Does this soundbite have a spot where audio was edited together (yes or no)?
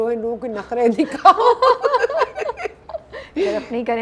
no